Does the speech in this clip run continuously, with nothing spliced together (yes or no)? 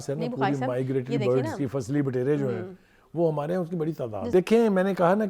no